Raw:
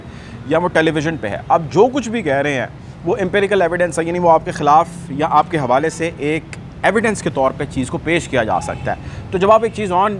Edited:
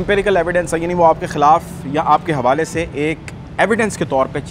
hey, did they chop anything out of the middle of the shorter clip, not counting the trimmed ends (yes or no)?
no